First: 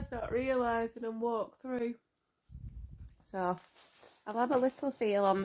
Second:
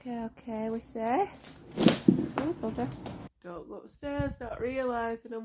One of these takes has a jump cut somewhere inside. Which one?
second; 1 cut; at 3.3 s

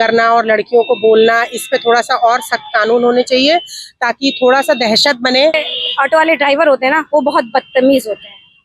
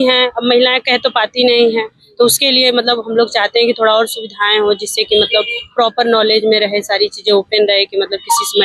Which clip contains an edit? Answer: first; 1 cut; at 5.5 s

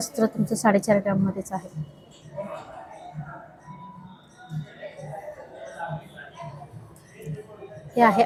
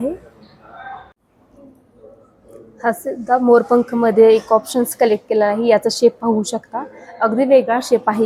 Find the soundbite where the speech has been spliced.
second; 1 cut; at 1.2 s

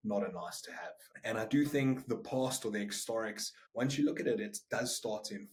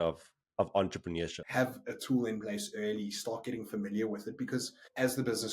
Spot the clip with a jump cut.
second; 1 cut; at 1.4 s

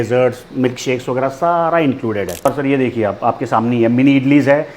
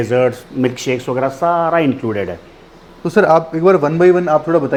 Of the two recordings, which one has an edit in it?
first; 1 cut; at 2.4 s

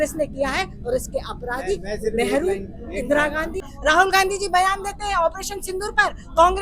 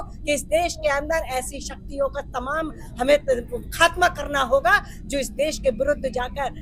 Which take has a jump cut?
first; 1 cut; at 3.7 s

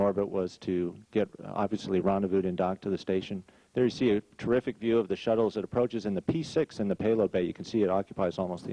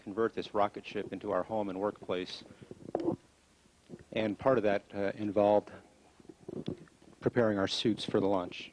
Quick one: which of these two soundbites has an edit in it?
first; 1 cut; at 1.6 s

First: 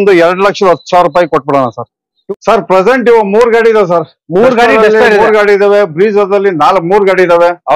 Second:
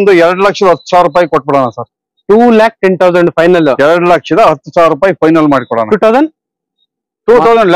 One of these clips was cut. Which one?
first; 1 cut; at 2.1 s

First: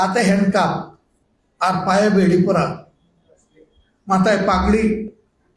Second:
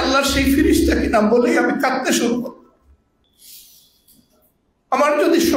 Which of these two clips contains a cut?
second; 1 cut; at 3.2 s

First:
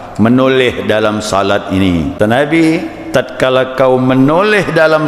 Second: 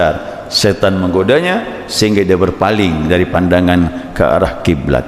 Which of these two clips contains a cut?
first; 1 cut; at 2.2 s

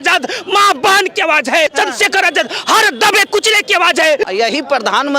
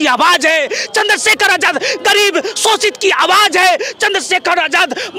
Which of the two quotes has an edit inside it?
first; 2 cuts; at 1.7 s, 4.3 s

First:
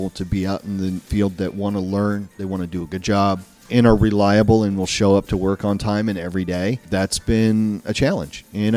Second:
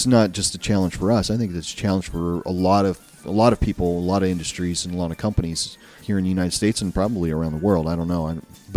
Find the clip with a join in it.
first; 3 cuts; at 1.0 s, 3.6 s, 6.8 s

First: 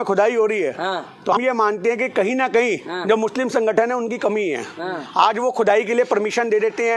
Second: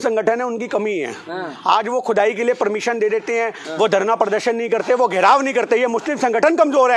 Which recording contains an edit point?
first; 1 cut; at 1.3 s

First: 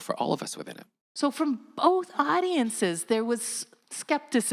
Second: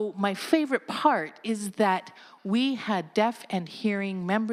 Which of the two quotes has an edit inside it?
first; 1 cut; at 1.0 s

